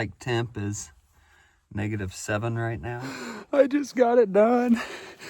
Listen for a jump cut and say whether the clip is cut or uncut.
cut